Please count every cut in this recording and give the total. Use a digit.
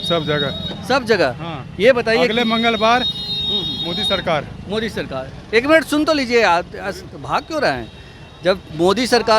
0